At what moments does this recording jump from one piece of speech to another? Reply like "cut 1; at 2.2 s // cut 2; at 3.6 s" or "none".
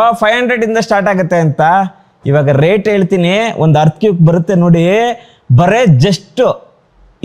none